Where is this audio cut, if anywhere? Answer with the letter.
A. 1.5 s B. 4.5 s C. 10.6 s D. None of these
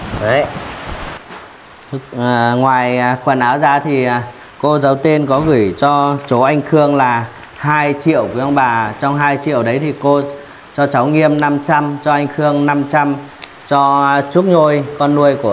A